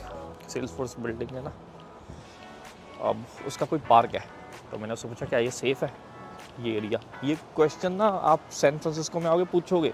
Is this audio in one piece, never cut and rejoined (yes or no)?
yes